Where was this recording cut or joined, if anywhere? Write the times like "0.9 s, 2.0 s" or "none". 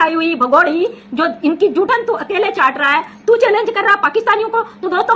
none